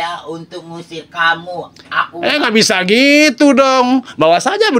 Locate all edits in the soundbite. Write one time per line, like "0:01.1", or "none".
none